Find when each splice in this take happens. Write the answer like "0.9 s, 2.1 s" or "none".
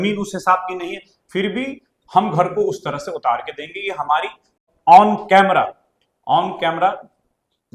4.6 s